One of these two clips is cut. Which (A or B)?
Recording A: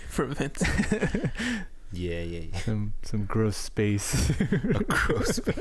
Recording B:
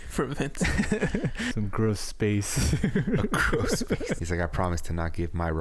B